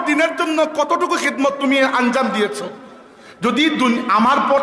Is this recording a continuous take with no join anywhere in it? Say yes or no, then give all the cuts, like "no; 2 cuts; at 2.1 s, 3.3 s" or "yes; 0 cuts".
yes; 0 cuts